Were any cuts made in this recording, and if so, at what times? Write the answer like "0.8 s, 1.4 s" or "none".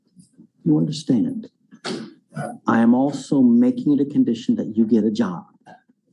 4.4 s